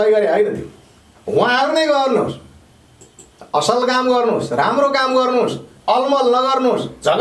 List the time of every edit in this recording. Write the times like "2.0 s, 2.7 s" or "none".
none